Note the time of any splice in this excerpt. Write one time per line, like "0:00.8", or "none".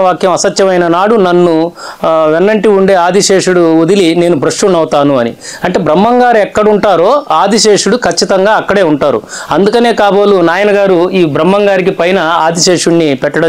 none

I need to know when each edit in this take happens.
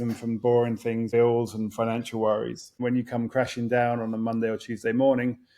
0:01.1
0:02.8

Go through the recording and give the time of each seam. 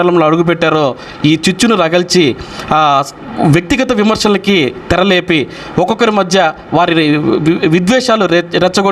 none

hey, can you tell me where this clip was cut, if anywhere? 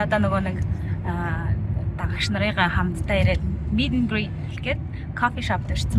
0:04.5

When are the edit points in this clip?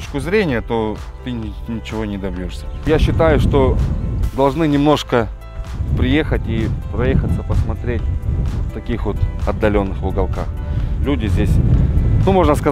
0:02.6

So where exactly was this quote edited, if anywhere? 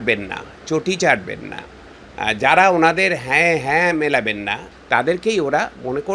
0:04.7

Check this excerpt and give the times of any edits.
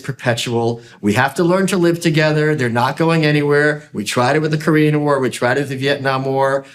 none

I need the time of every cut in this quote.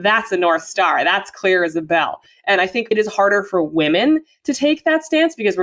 0:02.9

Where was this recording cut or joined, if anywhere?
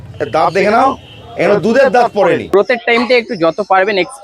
0:02.5

